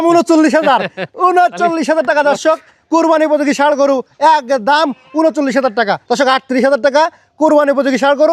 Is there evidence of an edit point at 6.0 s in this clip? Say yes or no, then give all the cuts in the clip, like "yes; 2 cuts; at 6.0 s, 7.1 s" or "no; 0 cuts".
yes; 1 cut; at 6.0 s